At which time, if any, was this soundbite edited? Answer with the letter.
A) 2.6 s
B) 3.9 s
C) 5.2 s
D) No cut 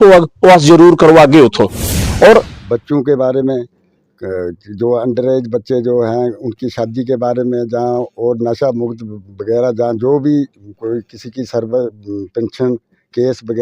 A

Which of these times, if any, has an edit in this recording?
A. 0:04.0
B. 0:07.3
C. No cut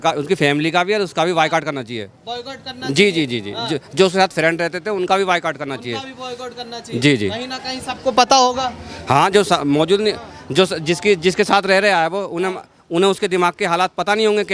C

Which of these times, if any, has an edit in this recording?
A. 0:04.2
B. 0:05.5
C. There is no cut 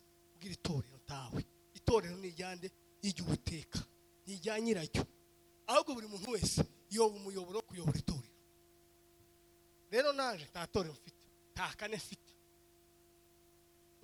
C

